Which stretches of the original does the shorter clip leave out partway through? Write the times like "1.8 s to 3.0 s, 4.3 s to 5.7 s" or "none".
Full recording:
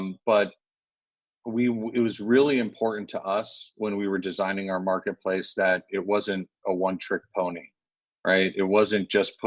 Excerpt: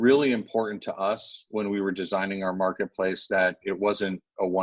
none